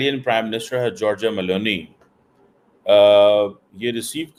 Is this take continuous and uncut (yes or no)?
yes